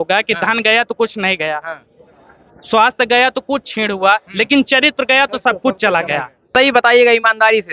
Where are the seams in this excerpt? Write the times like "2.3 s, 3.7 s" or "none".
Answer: 6.5 s